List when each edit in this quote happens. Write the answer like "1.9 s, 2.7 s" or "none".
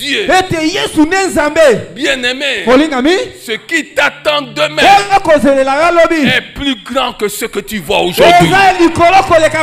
none